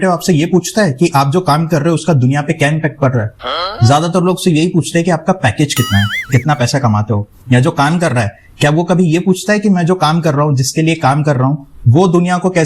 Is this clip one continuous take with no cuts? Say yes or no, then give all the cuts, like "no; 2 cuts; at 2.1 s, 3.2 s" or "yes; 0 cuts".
yes; 0 cuts